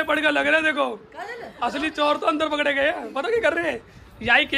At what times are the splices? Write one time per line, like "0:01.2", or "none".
none